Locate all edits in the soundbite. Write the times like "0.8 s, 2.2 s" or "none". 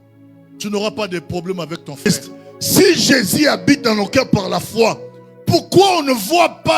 2.1 s

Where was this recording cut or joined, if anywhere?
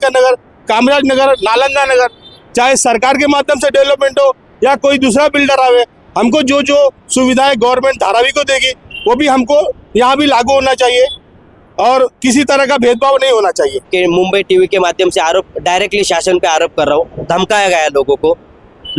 13.9 s

